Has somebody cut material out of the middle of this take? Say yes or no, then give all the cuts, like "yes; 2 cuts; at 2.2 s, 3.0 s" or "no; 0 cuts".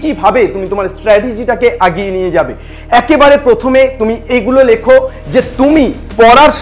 no; 0 cuts